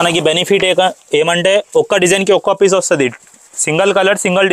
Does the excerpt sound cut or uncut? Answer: uncut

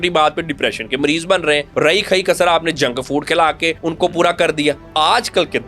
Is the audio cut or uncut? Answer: cut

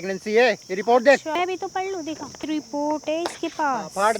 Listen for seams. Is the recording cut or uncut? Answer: cut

